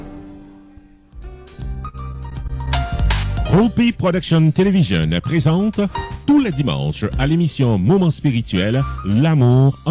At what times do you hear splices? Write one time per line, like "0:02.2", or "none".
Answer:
0:01.3

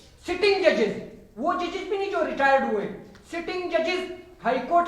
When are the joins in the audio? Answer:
none

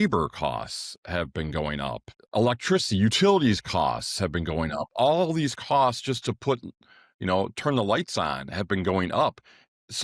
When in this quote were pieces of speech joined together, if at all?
0:02.4

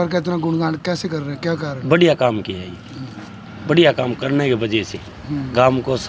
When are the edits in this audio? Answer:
none

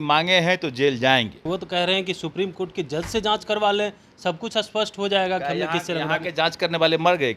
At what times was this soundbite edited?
0:01.4

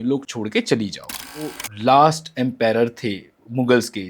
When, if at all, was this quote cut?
0:01.5

